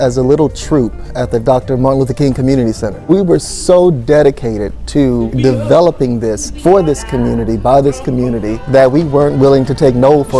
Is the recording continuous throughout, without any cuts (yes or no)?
no